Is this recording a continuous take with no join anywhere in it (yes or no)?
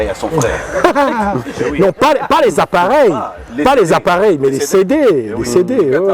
yes